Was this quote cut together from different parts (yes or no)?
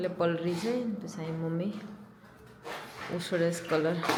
no